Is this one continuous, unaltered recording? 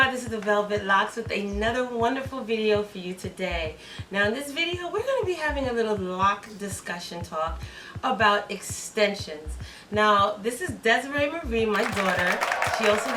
yes; 0 cuts

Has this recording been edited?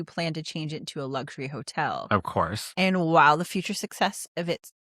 yes; 1 cut; at 2.6 s

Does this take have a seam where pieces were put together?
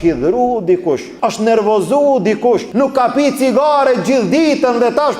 yes; 2 cuts; at 1.1 s, 2.7 s

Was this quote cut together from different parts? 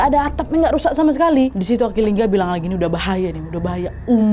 yes; 1 cut; at 1.5 s

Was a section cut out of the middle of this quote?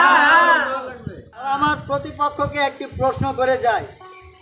yes; 1 cut; at 1.4 s

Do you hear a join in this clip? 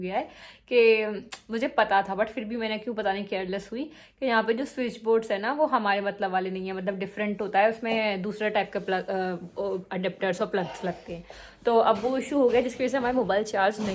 no; 0 cuts

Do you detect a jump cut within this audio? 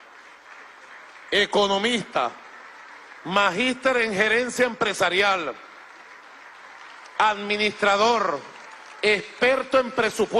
no; 0 cuts

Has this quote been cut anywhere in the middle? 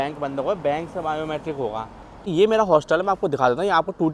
yes; 1 cut; at 2.3 s

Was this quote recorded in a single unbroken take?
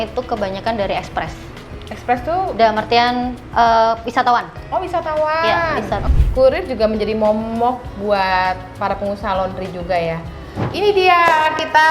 no; 2 cuts; at 6.0 s, 10.7 s

